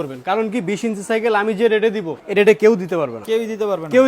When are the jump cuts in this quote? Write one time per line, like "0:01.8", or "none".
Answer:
0:02.1
0:03.2